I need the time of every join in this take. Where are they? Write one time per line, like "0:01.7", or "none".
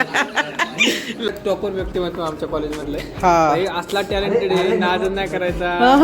0:01.3